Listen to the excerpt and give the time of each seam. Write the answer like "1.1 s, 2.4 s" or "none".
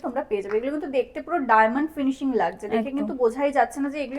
none